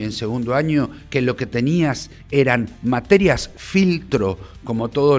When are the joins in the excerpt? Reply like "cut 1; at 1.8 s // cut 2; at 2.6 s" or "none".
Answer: none